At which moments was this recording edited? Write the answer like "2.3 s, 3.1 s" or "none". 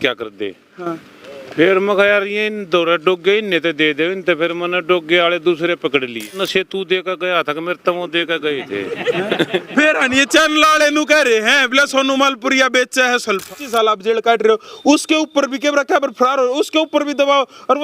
6.4 s, 13.5 s